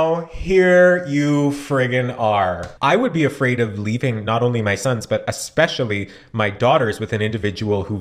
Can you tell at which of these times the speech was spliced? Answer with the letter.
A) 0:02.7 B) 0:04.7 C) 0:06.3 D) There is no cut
A